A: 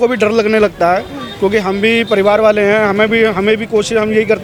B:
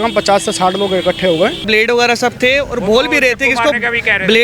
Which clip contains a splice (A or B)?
B